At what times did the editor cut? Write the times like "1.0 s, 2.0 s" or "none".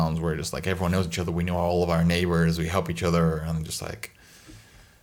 none